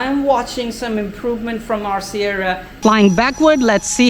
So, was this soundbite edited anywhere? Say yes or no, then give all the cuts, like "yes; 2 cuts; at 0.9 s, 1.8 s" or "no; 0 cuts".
yes; 1 cut; at 2.7 s